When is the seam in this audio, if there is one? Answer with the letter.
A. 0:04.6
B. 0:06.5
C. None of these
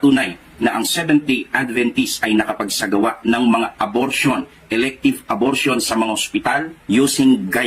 A